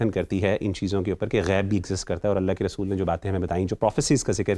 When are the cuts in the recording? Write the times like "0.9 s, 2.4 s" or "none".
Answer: none